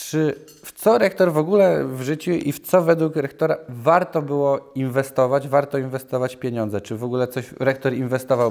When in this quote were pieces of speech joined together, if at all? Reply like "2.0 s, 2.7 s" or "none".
none